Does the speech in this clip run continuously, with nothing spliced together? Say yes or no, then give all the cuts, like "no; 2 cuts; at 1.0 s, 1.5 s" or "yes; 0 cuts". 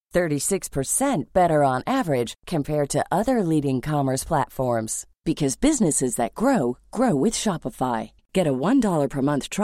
yes; 0 cuts